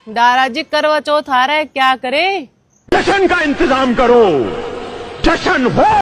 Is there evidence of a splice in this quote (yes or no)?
yes